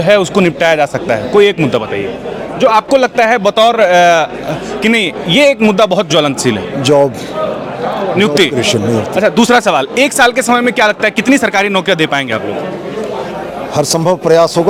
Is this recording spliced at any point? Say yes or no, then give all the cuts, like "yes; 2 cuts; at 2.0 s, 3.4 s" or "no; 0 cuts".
no; 0 cuts